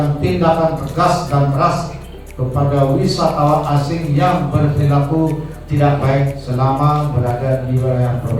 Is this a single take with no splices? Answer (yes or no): yes